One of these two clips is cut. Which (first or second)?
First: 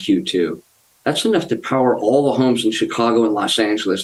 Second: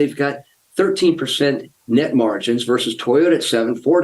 second